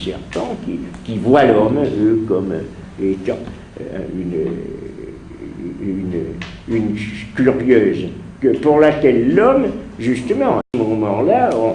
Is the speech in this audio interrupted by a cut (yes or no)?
no